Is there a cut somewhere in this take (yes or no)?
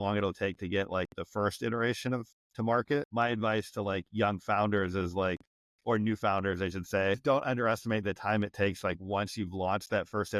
yes